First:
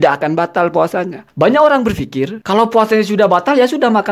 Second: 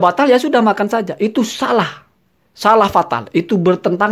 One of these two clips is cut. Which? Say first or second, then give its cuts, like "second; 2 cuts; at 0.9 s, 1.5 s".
first; 2 cuts; at 1.2 s, 2.4 s